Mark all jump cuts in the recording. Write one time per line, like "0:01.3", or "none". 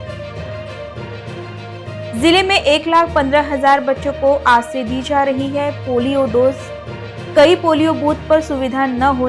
0:01.4